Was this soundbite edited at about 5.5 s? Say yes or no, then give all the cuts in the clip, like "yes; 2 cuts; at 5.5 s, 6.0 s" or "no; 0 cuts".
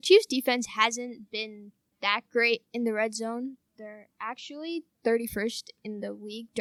no; 0 cuts